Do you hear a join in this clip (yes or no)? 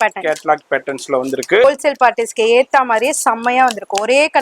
yes